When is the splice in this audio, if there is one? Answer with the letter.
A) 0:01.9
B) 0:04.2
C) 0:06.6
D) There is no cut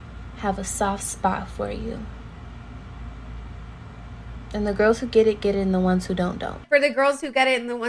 C